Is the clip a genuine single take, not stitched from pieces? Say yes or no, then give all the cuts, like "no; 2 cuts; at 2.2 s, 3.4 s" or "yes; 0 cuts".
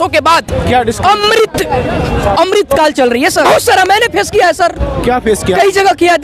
no; 1 cut; at 3.5 s